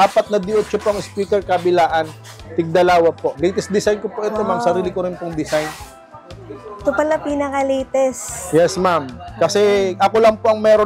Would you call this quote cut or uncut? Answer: uncut